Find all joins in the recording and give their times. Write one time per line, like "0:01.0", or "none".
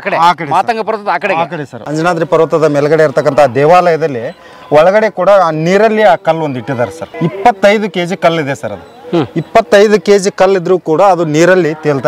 0:01.9
0:07.1